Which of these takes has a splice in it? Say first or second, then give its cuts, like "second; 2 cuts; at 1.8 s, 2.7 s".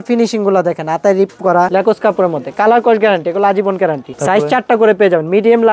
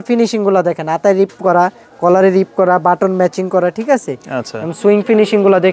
first; 2 cuts; at 1.7 s, 4.1 s